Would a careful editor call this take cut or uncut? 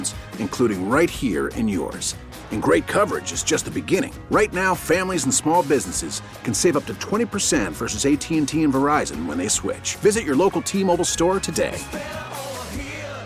uncut